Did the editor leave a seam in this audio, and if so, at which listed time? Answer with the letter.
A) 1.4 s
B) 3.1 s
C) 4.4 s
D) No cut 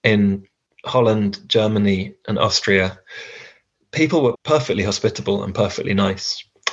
C